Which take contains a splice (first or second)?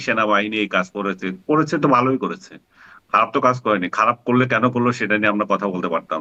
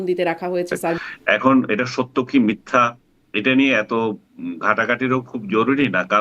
second